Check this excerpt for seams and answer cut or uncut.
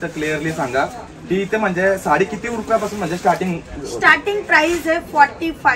uncut